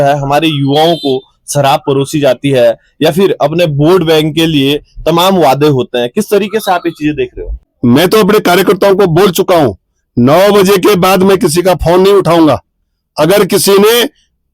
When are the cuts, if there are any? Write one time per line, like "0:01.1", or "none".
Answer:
0:07.7